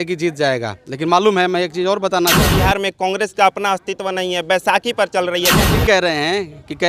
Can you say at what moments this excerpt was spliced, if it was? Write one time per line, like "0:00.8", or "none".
0:02.5
0:05.8